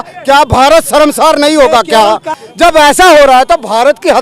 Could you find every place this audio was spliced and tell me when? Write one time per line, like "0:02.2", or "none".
0:02.4

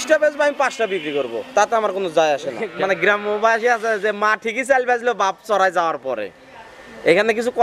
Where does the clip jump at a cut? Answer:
0:02.6

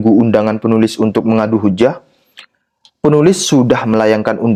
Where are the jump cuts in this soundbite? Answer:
none

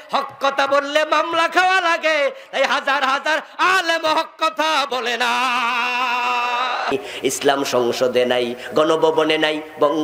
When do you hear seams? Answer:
0:06.9

